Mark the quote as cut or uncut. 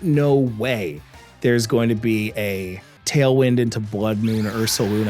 cut